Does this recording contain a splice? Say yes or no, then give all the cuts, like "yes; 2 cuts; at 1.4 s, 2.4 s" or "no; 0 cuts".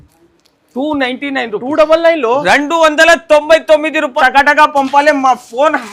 yes; 1 cut; at 4.1 s